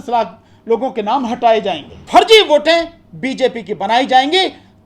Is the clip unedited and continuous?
no; 1 cut; at 2.0 s

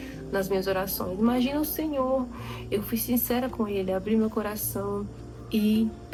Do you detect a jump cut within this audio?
no; 0 cuts

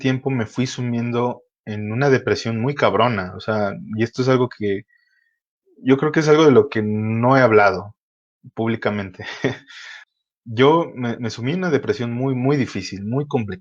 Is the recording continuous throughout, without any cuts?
no; 1 cut; at 9.9 s

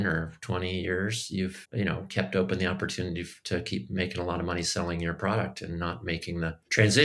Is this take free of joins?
no; 1 cut; at 1.6 s

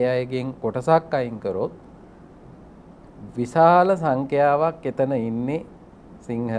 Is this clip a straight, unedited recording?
yes; 0 cuts

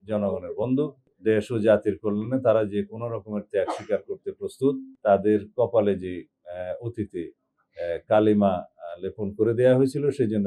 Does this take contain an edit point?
yes; 2 cuts; at 1.0 s, 4.9 s

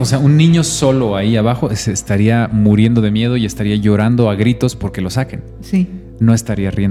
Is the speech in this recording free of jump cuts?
yes; 0 cuts

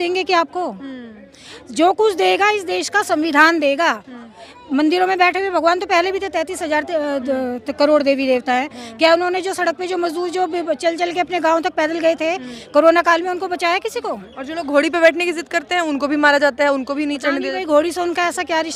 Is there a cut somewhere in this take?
no; 0 cuts

